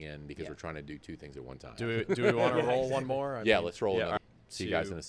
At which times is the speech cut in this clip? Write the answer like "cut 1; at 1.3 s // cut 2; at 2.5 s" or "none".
cut 1; at 4.2 s